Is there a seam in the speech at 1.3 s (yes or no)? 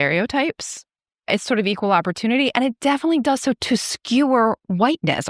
yes